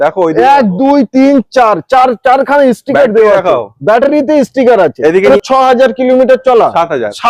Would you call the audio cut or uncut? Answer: cut